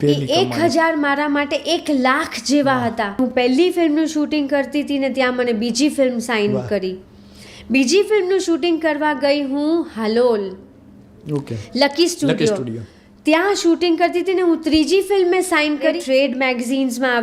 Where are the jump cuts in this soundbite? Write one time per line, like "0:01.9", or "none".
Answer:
0:03.2
0:16.0